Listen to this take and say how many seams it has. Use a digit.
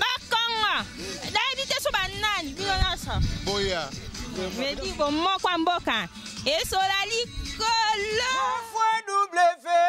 1